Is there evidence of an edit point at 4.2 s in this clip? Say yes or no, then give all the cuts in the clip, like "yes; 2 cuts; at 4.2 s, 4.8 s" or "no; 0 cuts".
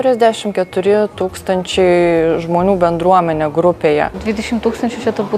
yes; 1 cut; at 4.2 s